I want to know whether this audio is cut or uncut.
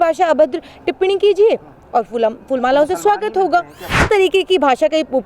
cut